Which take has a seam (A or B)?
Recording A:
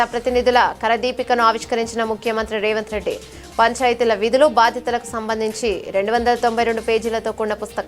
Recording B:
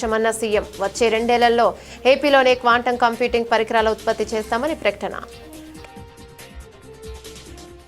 B